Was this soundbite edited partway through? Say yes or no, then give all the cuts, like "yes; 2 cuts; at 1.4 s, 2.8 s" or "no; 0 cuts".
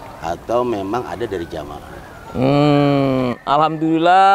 no; 0 cuts